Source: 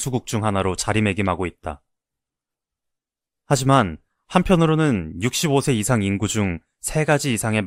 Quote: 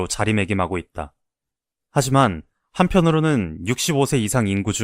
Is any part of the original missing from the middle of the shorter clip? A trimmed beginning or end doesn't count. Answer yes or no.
yes